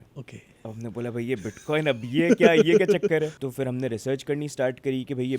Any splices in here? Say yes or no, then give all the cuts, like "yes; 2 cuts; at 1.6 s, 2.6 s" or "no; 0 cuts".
yes; 1 cut; at 3.4 s